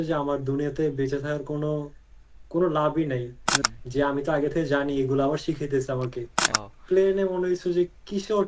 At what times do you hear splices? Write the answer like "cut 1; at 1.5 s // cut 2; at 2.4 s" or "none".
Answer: cut 1; at 3.5 s // cut 2; at 6.4 s